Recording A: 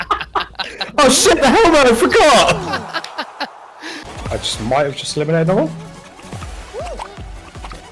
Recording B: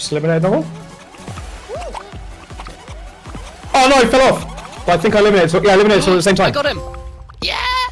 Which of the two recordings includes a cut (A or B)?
A